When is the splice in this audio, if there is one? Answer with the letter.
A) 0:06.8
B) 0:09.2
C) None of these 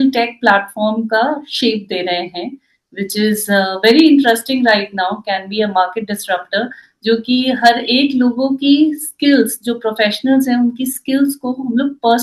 C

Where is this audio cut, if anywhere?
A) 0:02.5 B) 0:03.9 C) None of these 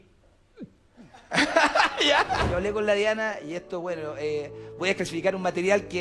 A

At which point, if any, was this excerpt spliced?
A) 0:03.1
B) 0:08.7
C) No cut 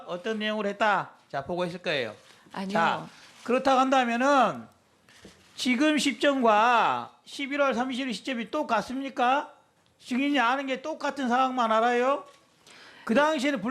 B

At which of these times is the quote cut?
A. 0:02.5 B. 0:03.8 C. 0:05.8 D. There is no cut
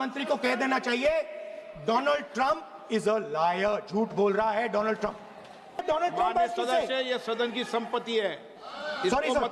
C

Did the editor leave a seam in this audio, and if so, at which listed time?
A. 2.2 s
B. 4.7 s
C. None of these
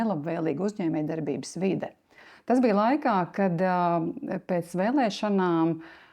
A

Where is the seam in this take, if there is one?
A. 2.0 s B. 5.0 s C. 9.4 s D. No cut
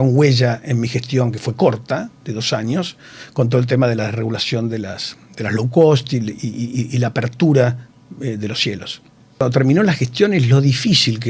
C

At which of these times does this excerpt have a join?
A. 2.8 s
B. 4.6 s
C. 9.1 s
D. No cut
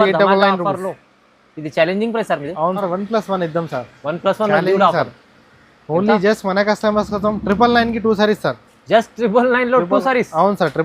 A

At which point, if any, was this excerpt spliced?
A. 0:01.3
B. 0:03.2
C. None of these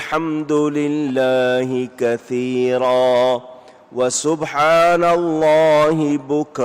B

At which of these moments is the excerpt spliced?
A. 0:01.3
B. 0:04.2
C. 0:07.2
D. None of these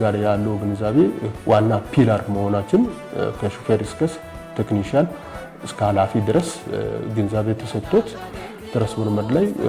A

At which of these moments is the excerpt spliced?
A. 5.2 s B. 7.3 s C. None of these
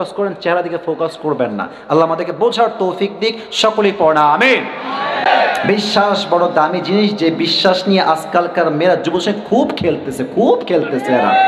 A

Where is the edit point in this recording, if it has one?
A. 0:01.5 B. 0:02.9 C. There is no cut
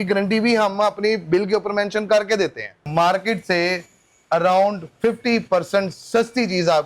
B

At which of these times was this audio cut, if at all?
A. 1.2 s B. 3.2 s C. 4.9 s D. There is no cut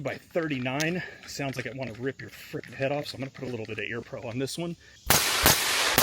C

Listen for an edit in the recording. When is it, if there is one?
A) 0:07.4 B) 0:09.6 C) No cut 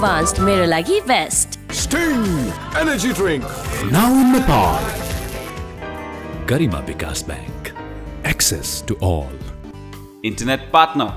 B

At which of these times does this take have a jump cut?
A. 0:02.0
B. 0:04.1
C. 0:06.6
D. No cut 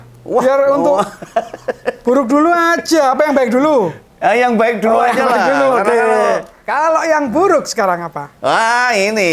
C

